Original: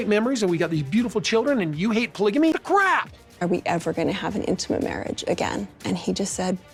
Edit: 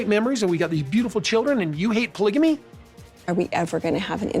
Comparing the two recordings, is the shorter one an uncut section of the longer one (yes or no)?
no